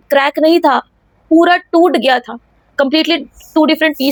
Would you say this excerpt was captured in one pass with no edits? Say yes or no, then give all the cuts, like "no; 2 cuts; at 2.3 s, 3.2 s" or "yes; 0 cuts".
yes; 0 cuts